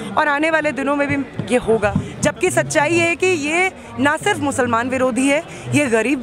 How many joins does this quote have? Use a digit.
1